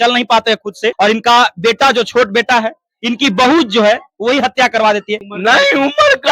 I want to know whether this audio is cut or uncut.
cut